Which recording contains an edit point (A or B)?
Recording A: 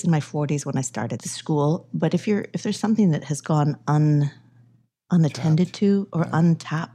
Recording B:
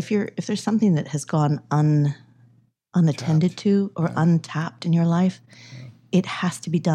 A